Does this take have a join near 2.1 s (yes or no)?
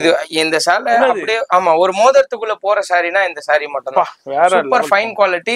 no